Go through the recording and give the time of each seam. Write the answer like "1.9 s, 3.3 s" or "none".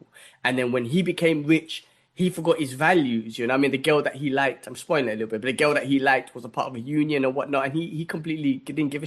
none